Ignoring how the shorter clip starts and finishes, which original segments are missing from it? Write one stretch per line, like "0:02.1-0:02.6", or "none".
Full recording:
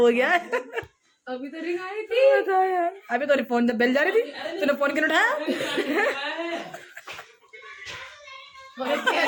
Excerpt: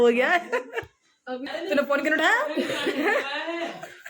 0:01.5-0:04.4